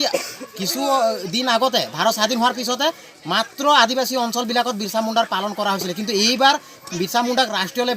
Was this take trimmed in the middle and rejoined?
no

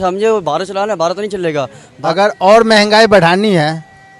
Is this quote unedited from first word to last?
no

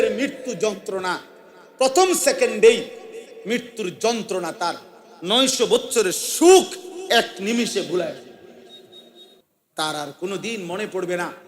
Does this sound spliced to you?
yes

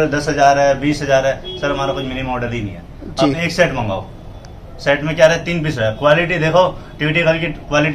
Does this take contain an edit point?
no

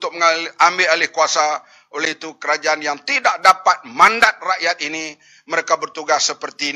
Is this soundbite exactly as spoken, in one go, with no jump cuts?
yes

